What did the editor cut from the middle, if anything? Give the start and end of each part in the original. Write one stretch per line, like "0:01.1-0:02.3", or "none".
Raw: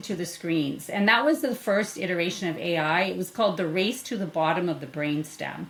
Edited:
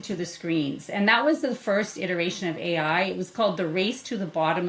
none